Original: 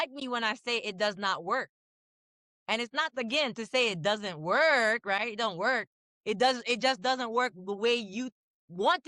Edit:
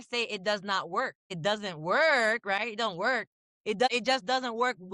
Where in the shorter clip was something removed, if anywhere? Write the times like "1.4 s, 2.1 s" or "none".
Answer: 1.4 s, 3.9 s